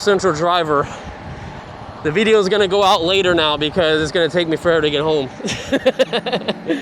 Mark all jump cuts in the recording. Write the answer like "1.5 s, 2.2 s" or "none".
none